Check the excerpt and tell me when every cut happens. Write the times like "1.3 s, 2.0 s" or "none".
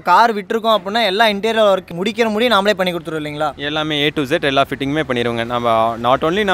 none